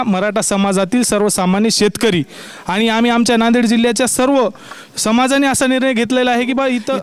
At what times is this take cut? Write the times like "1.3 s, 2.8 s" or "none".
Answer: none